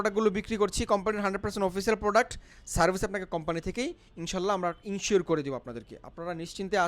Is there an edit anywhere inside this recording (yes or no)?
no